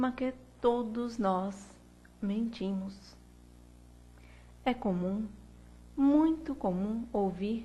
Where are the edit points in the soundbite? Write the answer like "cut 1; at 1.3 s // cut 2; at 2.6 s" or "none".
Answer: none